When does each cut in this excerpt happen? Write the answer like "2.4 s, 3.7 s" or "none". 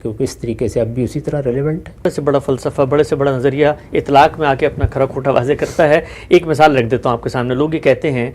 2.0 s